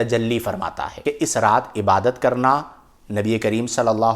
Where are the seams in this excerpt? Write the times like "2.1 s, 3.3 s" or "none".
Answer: 1.0 s